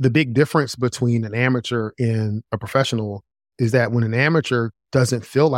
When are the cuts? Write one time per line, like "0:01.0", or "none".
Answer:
none

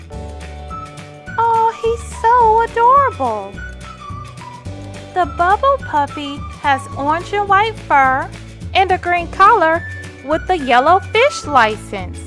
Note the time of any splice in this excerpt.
none

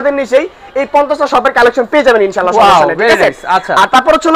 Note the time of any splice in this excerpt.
none

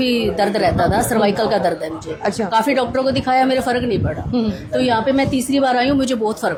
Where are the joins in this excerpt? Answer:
none

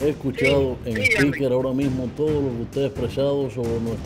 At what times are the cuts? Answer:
none

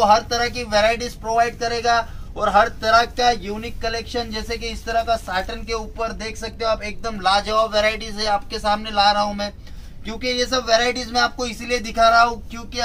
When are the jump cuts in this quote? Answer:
none

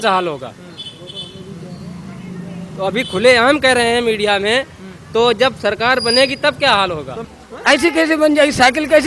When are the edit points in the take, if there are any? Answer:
0:07.3

